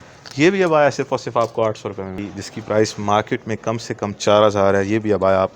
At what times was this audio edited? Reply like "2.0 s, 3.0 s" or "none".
2.2 s